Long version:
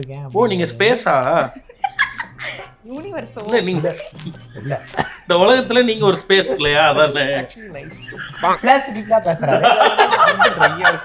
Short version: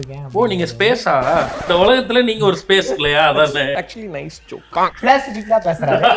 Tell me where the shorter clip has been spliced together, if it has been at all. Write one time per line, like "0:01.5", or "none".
0:01.6